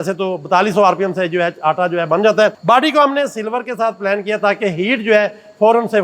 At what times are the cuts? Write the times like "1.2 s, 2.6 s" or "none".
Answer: 2.6 s